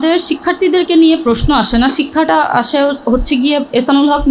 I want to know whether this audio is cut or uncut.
uncut